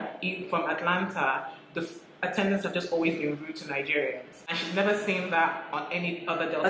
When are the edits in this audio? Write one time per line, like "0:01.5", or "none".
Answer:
none